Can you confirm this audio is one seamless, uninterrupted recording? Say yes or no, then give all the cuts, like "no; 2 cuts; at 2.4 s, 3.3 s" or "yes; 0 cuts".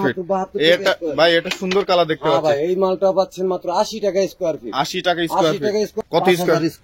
no; 1 cut; at 5.9 s